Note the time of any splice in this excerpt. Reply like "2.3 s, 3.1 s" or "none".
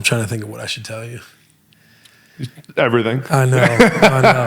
none

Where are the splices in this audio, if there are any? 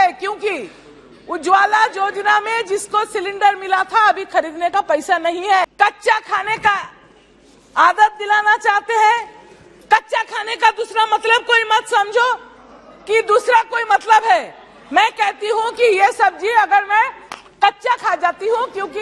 5.7 s

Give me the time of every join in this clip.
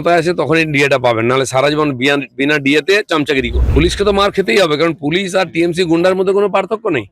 3.6 s

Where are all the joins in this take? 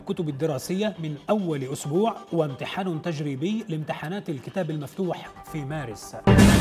none

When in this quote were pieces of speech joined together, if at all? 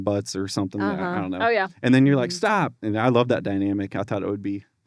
none

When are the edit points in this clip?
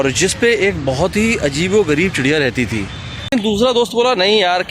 3.3 s

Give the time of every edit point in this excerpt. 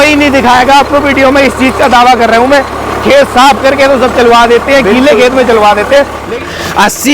6.2 s

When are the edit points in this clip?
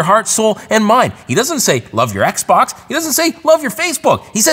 1.2 s

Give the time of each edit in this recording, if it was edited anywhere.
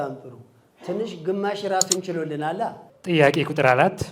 2.9 s

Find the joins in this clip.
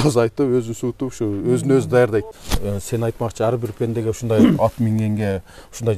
2.4 s

